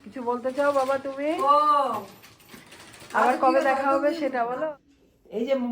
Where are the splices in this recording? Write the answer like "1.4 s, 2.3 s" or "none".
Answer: 4.6 s